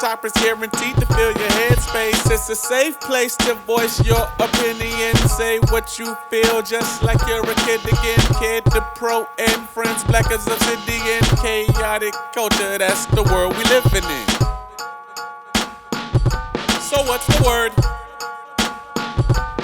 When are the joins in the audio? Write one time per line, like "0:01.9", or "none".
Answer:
0:17.9